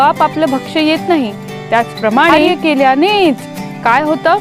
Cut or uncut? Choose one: cut